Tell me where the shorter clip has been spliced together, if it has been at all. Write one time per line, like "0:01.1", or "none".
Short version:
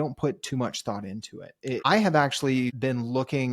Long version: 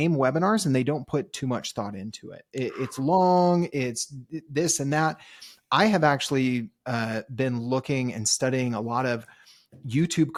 0:01.8
0:02.8